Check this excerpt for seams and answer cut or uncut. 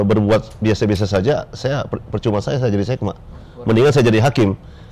uncut